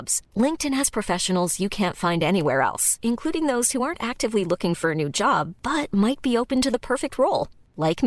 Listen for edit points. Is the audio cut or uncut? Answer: uncut